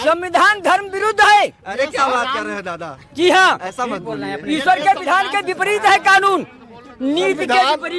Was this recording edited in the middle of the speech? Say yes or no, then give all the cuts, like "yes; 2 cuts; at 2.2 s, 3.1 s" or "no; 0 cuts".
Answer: no; 0 cuts